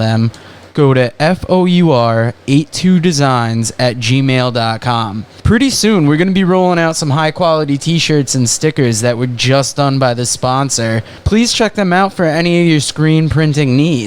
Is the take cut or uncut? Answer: uncut